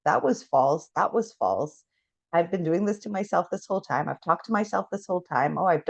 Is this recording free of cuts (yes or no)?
yes